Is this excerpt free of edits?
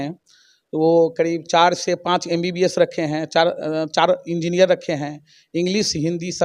yes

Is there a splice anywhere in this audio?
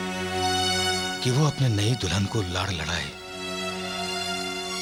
no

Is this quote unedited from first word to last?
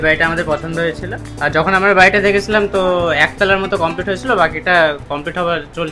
yes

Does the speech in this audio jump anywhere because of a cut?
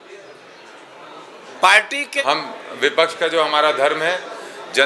yes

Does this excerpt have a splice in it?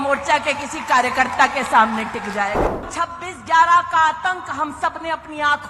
yes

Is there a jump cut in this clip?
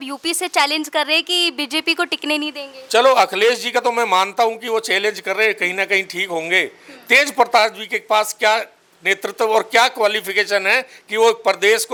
no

